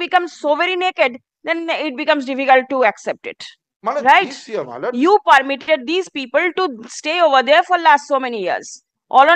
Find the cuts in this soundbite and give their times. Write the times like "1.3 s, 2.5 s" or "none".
none